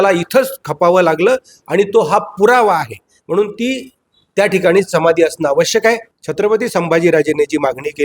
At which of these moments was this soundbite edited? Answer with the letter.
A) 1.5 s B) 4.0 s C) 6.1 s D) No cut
C